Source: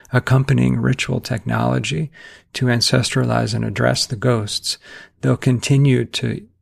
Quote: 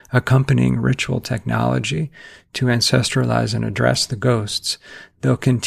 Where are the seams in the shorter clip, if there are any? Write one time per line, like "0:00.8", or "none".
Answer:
none